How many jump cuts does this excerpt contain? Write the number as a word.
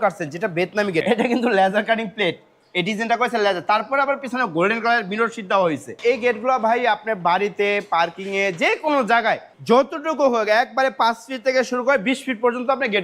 three